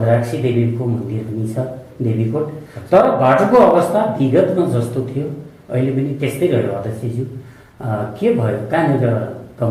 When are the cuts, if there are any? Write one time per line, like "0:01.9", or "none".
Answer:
none